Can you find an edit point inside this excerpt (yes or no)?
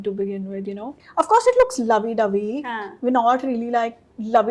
yes